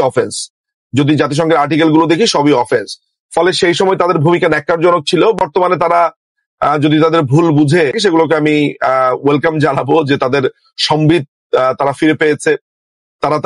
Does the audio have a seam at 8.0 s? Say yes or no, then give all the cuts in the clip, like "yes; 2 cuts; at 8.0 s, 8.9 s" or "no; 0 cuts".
yes; 1 cut; at 8.0 s